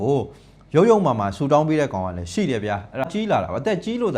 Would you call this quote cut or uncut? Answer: cut